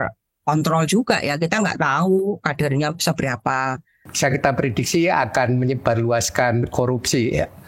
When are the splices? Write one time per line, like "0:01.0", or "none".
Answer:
0:04.1